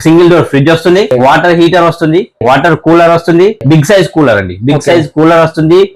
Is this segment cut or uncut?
cut